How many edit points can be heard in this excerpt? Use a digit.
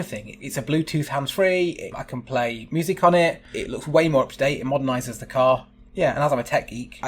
2